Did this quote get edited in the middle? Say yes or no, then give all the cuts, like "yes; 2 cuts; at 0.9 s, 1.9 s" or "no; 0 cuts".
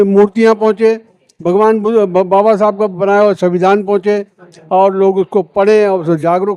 no; 0 cuts